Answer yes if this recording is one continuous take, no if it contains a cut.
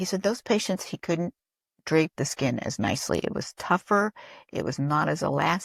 yes